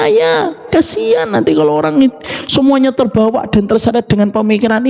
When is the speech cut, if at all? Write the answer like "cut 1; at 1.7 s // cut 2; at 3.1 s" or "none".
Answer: none